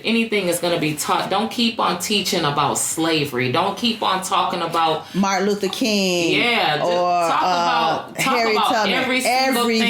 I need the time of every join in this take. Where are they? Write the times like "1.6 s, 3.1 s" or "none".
none